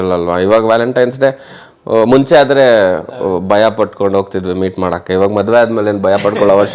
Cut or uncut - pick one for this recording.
uncut